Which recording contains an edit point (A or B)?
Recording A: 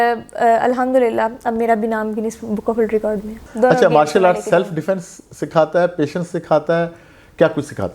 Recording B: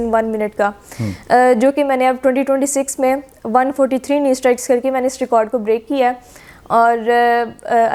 A